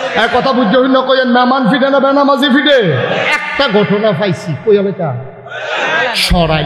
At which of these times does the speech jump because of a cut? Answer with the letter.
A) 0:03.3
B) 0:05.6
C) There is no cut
A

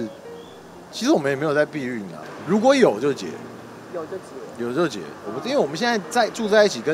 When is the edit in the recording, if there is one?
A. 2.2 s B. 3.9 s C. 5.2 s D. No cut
A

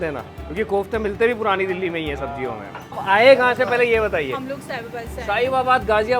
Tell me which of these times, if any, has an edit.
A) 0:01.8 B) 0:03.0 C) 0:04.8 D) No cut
B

